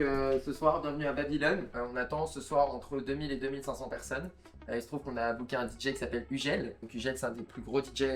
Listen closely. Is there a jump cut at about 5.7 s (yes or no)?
no